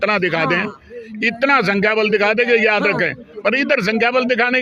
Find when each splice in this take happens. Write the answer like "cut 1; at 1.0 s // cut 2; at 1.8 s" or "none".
none